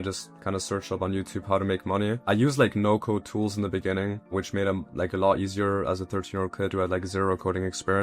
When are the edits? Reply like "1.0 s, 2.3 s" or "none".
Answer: 2.2 s, 4.3 s